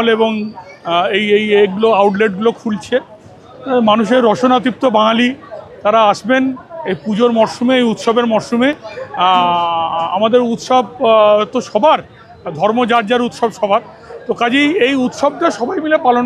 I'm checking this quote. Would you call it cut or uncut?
uncut